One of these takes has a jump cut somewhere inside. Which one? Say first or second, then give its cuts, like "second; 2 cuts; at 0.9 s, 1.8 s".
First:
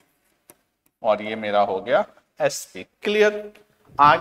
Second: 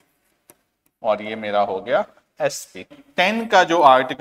second; 1 cut; at 3.0 s